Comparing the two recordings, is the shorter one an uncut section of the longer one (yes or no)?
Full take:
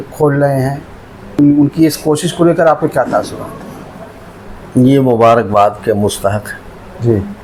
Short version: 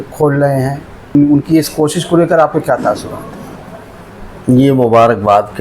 no